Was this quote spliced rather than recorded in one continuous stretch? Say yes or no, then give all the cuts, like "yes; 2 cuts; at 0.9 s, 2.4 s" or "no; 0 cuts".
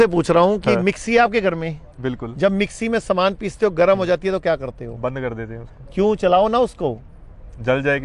no; 0 cuts